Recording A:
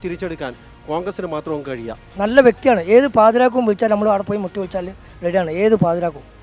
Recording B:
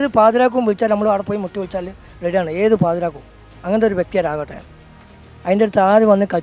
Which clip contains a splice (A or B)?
A